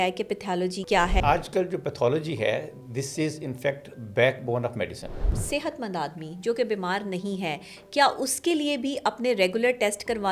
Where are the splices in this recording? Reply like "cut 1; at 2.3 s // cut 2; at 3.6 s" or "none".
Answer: cut 1; at 1.2 s // cut 2; at 5.4 s

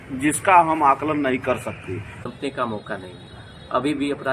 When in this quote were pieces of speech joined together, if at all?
cut 1; at 2.2 s

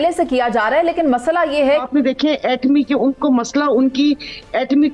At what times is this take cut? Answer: cut 1; at 1.8 s

